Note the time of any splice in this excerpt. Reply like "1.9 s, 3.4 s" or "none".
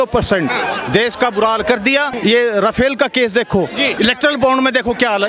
2.1 s, 3.9 s